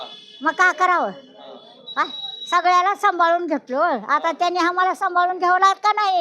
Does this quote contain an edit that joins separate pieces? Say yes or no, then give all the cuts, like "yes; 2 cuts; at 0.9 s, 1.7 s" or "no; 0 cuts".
no; 0 cuts